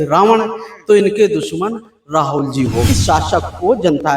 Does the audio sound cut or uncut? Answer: cut